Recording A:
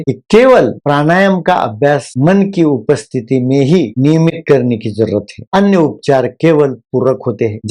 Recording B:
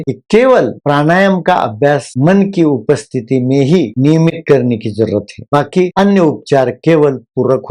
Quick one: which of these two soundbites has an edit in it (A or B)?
A